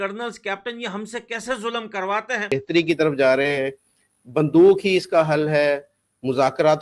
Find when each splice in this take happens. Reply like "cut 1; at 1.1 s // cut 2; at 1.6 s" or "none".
cut 1; at 2.4 s